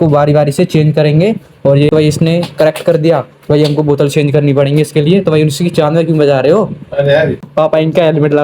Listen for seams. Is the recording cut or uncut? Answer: cut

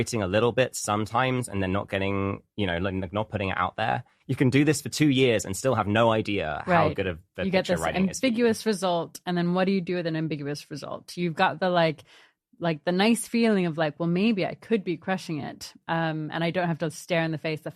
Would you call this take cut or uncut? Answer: uncut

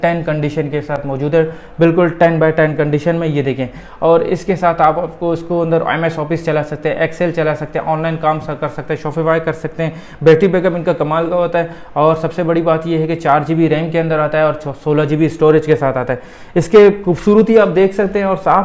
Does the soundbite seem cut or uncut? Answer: uncut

